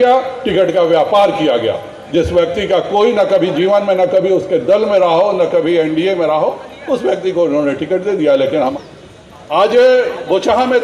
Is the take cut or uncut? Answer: cut